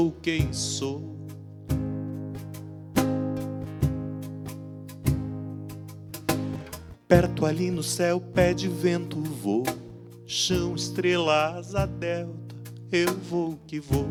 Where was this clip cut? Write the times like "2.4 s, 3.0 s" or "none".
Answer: none